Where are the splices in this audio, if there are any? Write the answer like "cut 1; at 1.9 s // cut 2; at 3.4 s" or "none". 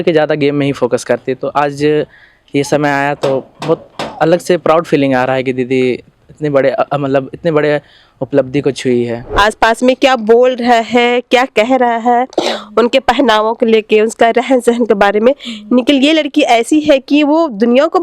cut 1; at 9.2 s